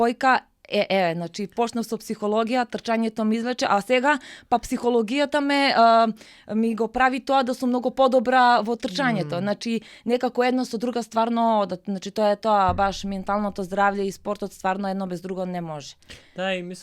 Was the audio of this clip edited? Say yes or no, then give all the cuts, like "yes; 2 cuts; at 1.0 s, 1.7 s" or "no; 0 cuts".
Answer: no; 0 cuts